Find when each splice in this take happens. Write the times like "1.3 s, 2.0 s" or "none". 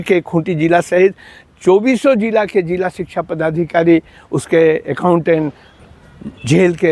5.7 s